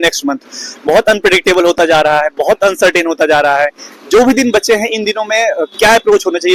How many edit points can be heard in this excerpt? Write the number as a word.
zero